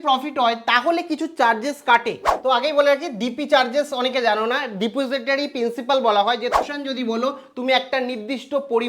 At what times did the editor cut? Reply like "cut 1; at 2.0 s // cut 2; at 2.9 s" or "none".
cut 1; at 2.3 s // cut 2; at 6.6 s

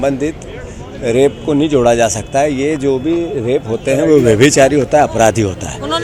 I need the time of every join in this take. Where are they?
none

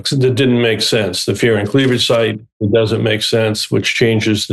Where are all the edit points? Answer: none

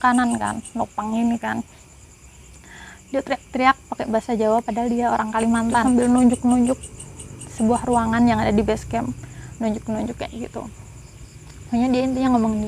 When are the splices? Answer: cut 1; at 5.8 s

